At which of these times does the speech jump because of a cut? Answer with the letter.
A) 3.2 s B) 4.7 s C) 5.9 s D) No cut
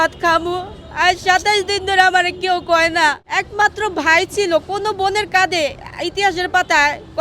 A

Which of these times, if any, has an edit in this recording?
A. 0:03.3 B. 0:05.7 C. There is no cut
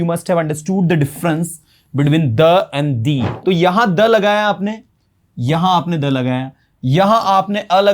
A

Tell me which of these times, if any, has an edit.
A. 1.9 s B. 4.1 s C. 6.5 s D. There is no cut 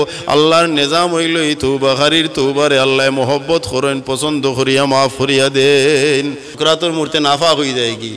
C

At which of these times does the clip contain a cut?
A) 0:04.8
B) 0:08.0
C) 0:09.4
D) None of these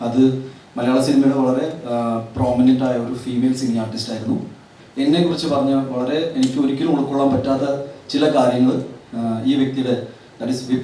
A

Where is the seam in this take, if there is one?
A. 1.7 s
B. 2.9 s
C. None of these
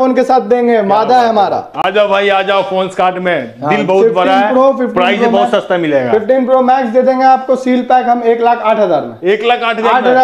C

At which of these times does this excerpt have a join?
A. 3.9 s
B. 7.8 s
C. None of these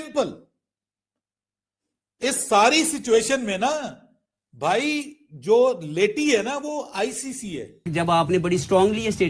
B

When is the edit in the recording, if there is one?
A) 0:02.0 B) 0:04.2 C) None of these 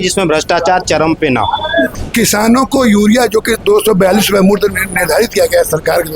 A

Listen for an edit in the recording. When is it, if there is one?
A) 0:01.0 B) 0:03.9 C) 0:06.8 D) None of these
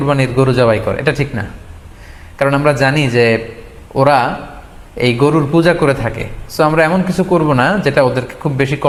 D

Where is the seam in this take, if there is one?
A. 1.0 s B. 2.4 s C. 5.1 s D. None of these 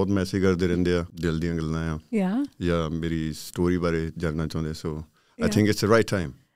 A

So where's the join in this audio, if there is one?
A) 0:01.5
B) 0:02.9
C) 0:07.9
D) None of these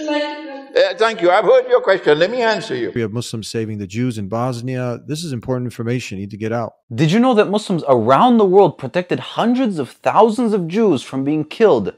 B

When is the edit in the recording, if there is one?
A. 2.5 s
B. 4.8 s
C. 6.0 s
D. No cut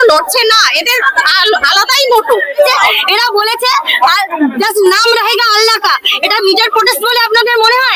A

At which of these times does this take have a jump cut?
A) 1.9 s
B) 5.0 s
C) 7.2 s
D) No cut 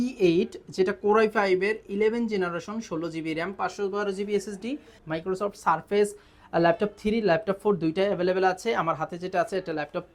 B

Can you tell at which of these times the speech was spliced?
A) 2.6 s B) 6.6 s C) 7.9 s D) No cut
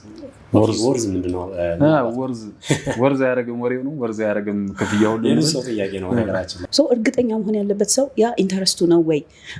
B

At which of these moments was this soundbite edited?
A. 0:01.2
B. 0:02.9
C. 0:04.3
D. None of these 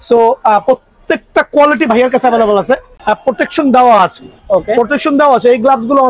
B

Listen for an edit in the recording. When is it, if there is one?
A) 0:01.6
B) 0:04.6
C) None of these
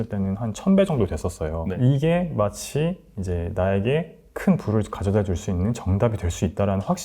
A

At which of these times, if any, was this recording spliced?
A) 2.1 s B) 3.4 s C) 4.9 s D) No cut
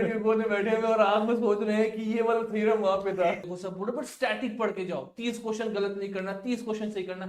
B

